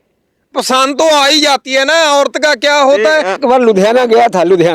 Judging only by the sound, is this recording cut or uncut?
cut